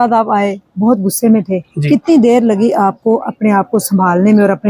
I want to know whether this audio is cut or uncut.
uncut